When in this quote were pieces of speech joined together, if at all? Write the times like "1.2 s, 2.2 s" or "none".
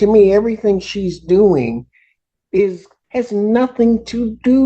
2.9 s